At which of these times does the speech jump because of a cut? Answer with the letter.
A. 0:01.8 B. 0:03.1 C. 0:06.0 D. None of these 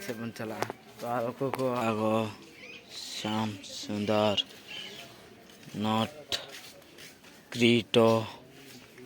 A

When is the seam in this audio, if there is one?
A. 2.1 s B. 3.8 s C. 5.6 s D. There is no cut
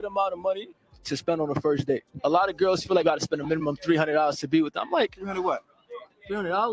A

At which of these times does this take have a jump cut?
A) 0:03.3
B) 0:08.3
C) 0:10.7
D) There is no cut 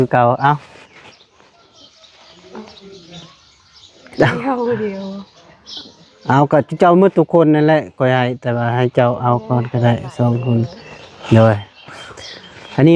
D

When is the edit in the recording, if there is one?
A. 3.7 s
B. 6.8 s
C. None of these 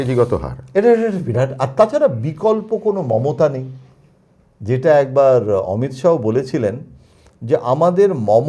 C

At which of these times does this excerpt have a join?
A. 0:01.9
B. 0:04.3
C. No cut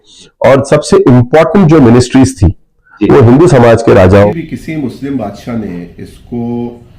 B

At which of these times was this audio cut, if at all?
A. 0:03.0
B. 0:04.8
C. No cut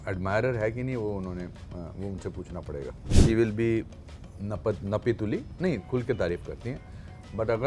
A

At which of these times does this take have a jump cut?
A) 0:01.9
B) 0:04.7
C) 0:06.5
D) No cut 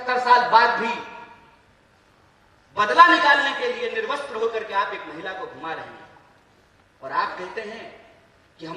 D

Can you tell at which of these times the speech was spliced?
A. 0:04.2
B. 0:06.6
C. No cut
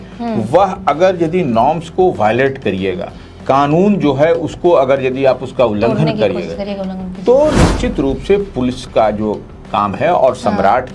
C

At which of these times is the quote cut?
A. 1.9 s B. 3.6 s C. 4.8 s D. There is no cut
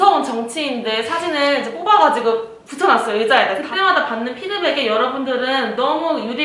B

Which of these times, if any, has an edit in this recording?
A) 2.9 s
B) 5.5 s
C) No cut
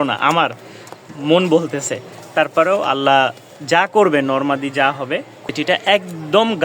B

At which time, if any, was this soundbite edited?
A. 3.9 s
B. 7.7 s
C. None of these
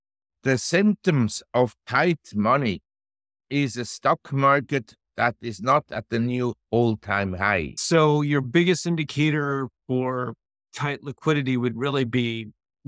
B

